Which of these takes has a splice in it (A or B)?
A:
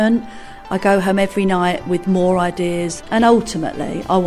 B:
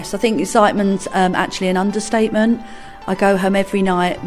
A